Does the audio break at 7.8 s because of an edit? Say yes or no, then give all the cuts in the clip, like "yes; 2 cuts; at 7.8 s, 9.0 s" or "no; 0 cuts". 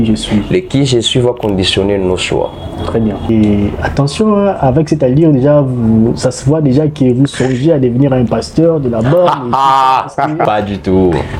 no; 2 cuts; at 3.3 s, 10.5 s